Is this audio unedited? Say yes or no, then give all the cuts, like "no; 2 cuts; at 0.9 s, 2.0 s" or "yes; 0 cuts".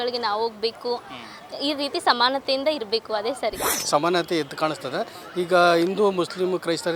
no; 1 cut; at 3.7 s